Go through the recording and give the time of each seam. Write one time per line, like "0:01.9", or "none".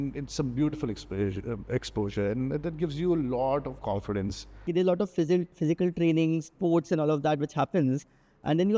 0:04.7